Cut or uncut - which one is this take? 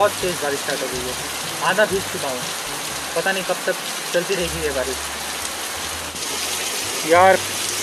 uncut